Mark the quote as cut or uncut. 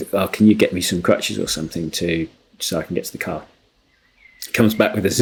uncut